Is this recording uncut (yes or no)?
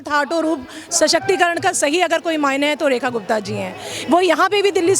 yes